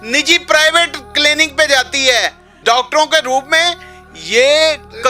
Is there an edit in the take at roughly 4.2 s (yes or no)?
no